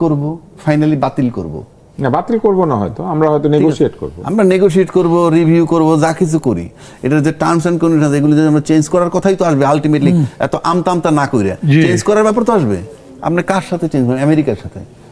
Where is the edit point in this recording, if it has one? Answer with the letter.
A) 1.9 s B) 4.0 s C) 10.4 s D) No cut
D